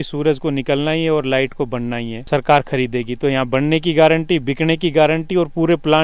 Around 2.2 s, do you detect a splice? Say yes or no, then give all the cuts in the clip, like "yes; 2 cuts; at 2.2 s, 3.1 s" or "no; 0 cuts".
yes; 1 cut; at 2.2 s